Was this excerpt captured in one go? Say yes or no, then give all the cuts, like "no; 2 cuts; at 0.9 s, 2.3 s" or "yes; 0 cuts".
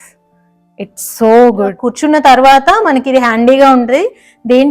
no; 1 cut; at 1.8 s